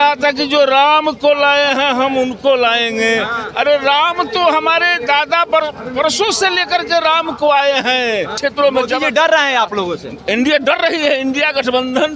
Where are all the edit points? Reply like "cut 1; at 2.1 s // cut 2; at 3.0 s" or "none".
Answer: cut 1; at 8.4 s